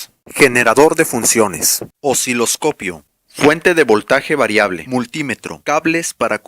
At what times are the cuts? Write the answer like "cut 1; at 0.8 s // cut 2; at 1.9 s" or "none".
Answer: cut 1; at 5.5 s